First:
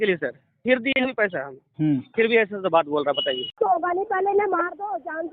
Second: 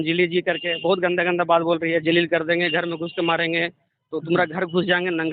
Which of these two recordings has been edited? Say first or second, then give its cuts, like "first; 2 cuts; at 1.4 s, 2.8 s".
first; 1 cut; at 3.5 s